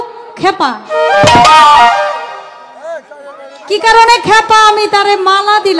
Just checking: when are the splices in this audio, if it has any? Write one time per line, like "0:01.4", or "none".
none